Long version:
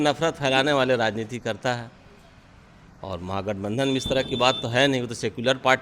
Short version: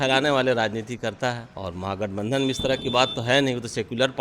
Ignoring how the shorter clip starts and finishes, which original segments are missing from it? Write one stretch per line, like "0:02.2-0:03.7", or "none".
0:02.0-0:03.0